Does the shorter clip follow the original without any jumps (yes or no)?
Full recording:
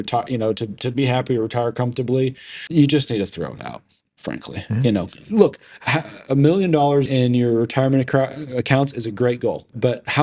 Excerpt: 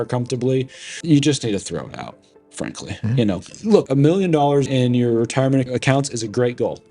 no